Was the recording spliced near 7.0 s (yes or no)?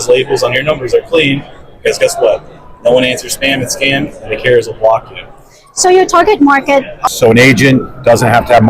yes